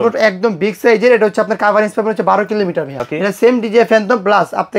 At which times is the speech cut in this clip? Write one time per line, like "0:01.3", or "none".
0:03.0